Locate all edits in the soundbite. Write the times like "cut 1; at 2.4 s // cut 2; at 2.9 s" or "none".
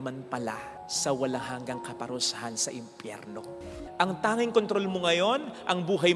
cut 1; at 3.7 s